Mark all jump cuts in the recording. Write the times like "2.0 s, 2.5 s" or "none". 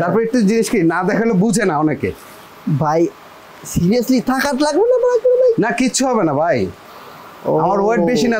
none